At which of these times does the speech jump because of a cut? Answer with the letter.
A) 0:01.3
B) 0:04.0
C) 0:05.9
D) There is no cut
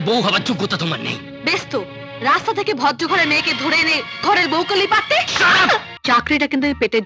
C